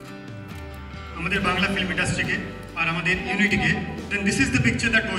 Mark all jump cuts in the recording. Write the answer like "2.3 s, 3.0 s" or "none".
none